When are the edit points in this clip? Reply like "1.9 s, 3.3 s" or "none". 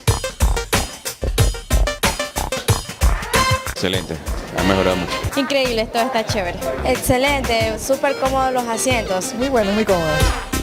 1.3 s, 3.6 s